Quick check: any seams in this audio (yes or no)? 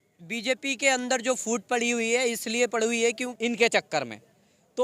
yes